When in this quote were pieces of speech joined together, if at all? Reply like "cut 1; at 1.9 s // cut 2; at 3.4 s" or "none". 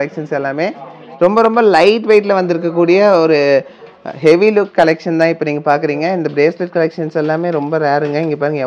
cut 1; at 1.0 s